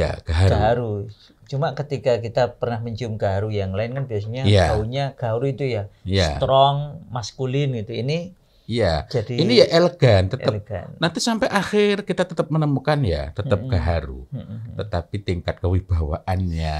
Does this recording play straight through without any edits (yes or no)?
yes